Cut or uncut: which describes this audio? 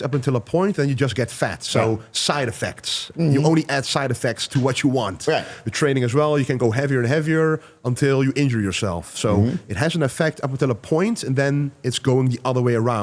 uncut